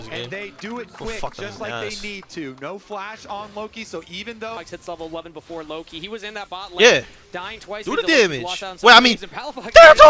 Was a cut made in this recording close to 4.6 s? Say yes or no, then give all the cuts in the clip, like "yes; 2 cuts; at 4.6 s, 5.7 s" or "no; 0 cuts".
yes; 1 cut; at 4.6 s